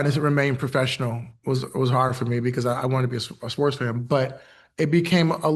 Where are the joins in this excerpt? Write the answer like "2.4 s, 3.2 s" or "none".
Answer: none